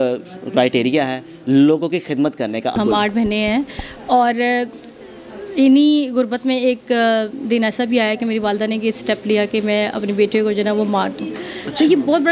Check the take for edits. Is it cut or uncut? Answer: cut